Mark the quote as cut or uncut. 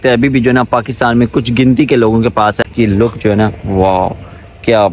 cut